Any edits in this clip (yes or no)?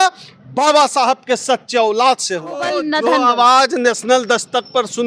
yes